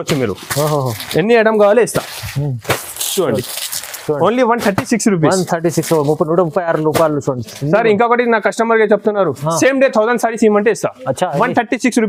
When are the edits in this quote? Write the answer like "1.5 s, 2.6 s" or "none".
none